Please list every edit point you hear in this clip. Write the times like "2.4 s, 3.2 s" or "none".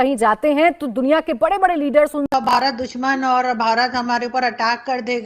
2.6 s